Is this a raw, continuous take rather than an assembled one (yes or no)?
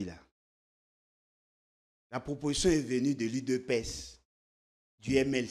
yes